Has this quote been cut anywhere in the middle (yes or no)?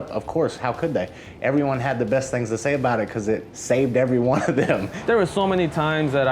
yes